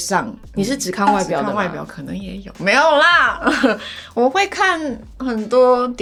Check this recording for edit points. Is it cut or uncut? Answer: uncut